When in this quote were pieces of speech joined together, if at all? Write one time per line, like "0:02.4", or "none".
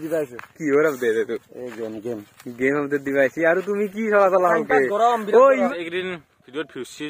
0:05.7